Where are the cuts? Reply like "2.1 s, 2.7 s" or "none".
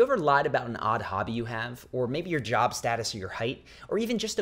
none